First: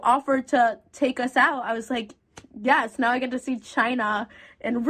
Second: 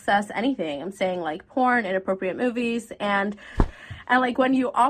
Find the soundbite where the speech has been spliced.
second; 1 cut; at 3.6 s

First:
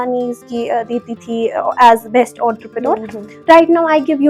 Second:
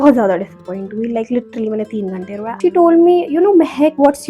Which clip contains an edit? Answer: second; 1 cut; at 2.4 s

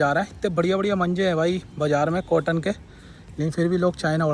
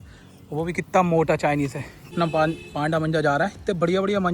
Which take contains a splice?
second; 1 cut; at 2.1 s

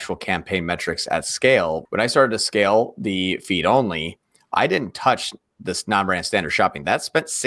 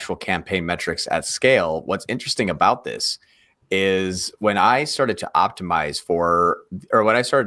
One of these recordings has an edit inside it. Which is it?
first; 1 cut; at 1.8 s

